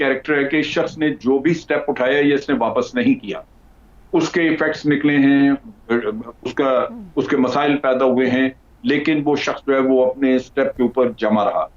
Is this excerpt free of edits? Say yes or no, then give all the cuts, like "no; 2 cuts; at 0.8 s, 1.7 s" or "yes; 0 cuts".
yes; 0 cuts